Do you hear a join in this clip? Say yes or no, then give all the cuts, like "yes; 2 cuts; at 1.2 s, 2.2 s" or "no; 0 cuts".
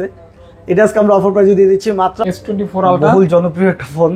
yes; 1 cut; at 2.2 s